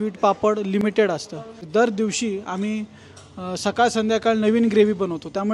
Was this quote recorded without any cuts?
no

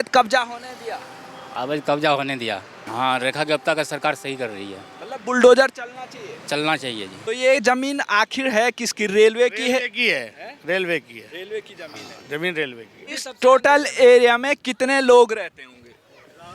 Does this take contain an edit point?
yes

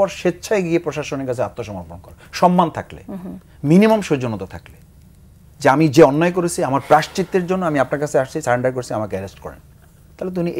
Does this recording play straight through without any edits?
yes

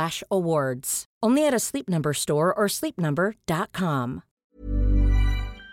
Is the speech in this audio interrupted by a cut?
yes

